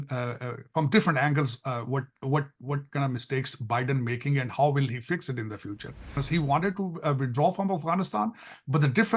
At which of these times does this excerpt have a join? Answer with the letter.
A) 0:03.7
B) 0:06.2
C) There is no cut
B